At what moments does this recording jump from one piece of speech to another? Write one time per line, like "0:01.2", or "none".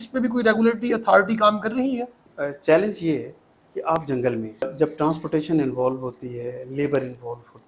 0:02.3
0:04.7